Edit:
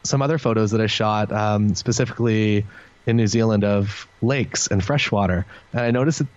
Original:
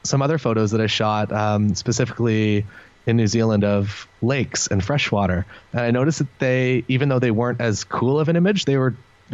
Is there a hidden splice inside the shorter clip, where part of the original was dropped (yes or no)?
no